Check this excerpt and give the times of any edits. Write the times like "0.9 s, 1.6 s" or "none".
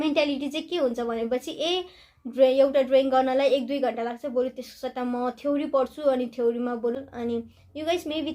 7.0 s